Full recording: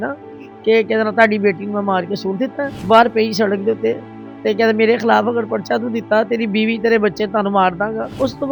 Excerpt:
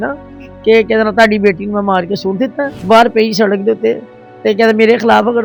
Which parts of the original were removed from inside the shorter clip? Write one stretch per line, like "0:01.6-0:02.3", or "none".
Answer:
none